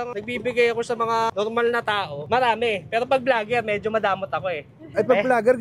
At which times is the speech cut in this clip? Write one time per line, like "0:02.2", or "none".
0:01.3